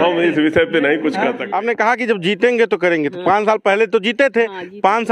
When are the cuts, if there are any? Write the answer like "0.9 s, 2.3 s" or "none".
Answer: 1.4 s